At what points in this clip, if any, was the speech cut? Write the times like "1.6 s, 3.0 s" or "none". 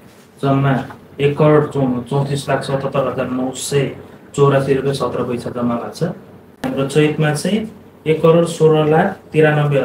6.7 s